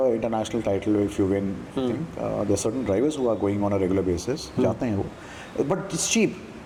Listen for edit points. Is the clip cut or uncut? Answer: uncut